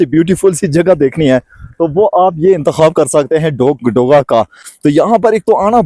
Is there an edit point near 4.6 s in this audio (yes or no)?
no